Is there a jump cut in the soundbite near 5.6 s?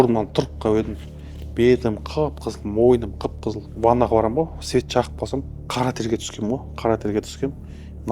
yes; 2 cuts; at 3.7 s, 5.6 s

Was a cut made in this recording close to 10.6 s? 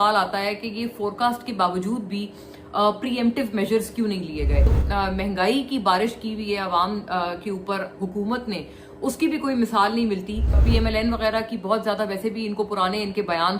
yes; 2 cuts; at 4.8 s, 10.6 s

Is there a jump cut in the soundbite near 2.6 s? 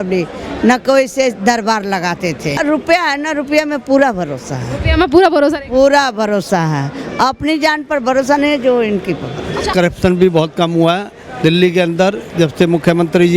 yes; 2 cuts; at 2.6 s, 9.7 s

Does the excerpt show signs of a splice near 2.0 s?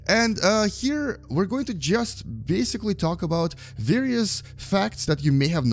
no; 0 cuts

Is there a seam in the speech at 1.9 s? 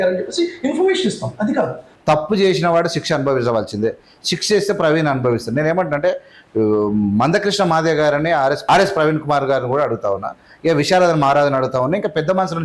yes; 2 cuts; at 1.9 s, 8.6 s

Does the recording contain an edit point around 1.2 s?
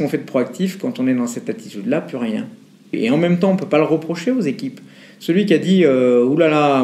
no; 1 cut; at 2.9 s

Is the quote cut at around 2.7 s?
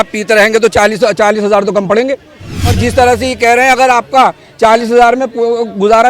yes; 1 cut; at 2.7 s

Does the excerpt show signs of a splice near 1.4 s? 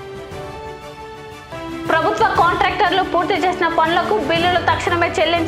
yes; 1 cut; at 1.4 s

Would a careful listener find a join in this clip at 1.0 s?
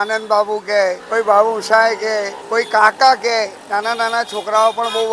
yes; 2 cuts; at 1.0 s, 2.4 s

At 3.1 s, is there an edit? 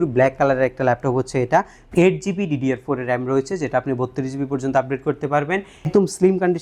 no; 2 cuts; at 1.8 s, 5.9 s

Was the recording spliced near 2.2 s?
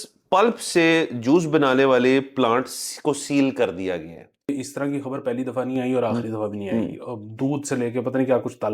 no; 1 cut; at 4.5 s

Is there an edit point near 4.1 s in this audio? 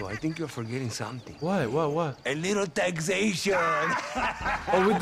no; 0 cuts

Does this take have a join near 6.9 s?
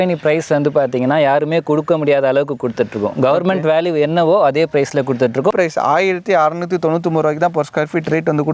no; 1 cut; at 5.5 s

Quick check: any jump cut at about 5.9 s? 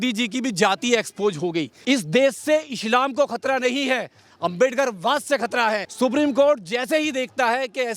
yes; 2 cuts; at 1.7 s, 5.9 s

